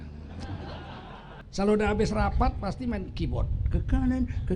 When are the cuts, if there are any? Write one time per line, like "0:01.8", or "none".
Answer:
0:01.4